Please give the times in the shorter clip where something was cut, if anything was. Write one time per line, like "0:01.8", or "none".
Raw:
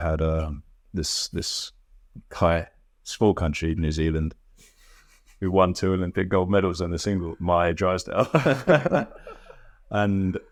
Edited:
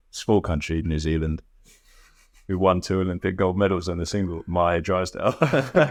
none